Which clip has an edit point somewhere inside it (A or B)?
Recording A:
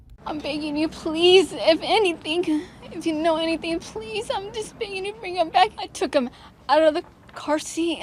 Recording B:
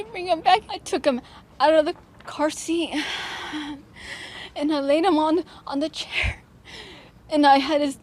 B